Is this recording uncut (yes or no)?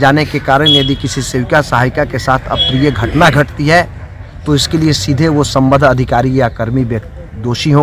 yes